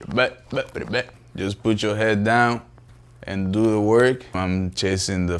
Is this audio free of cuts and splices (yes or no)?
no